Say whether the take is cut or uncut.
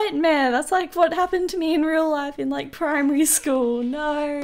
uncut